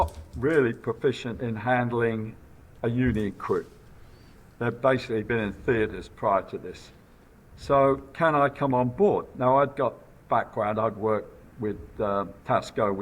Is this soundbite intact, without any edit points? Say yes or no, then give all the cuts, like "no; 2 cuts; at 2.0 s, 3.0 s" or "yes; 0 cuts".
yes; 0 cuts